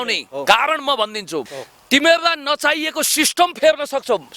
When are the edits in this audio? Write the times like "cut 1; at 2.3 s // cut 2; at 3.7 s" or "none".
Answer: cut 1; at 1.4 s